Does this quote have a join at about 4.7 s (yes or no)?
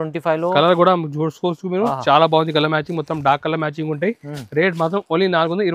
no